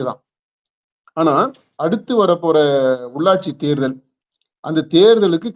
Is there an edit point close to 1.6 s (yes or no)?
yes